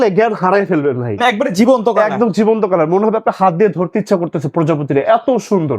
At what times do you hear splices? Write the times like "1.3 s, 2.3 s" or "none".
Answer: none